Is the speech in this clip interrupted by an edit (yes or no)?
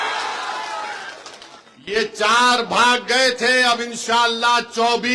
no